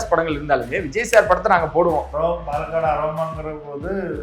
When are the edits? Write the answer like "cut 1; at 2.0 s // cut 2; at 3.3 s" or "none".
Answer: cut 1; at 2.1 s